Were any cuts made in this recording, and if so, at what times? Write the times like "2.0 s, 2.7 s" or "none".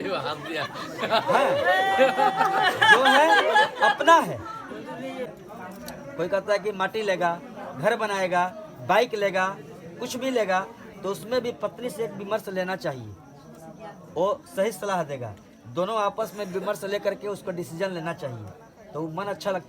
5.3 s